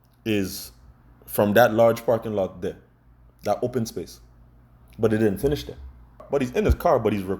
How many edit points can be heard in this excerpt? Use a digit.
1